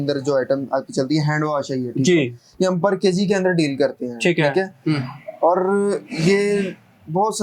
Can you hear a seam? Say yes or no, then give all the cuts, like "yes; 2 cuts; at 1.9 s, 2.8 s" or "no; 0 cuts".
no; 0 cuts